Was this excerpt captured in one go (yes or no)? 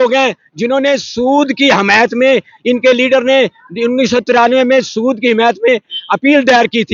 yes